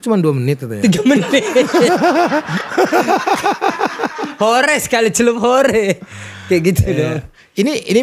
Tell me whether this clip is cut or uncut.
uncut